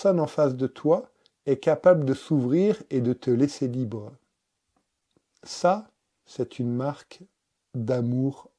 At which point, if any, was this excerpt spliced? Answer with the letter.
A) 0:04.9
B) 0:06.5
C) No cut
A